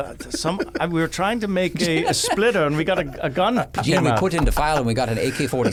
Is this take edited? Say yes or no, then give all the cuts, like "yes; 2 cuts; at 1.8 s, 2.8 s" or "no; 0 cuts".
no; 0 cuts